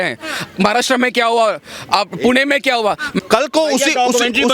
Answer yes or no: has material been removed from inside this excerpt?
yes